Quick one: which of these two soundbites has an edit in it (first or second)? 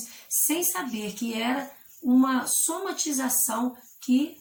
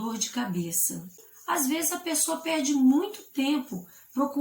second